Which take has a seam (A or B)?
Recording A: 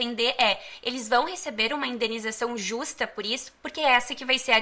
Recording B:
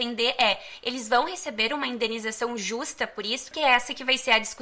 B